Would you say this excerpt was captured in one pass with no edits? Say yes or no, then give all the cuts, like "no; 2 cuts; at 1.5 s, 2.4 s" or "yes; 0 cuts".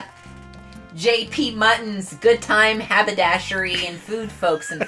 yes; 0 cuts